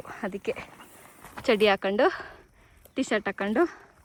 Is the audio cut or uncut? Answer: uncut